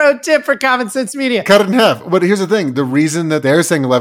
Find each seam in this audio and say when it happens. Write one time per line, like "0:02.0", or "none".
0:01.4